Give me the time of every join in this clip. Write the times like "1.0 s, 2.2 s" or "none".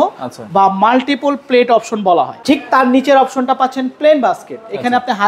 2.4 s